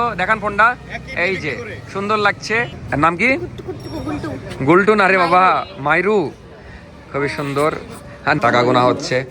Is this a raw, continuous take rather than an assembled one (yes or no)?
no